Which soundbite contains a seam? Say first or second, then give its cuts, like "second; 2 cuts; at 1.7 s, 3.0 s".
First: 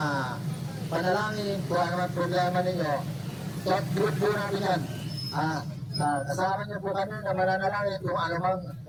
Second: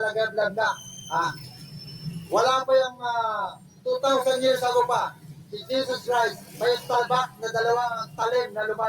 second; 1 cut; at 1.2 s